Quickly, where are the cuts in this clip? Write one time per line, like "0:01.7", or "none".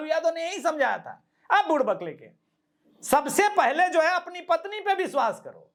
none